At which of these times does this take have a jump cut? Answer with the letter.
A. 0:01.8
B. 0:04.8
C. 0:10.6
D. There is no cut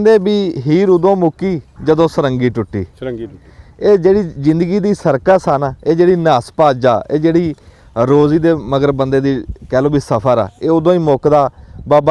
D